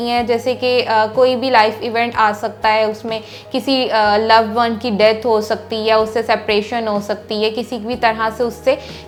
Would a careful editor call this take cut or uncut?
uncut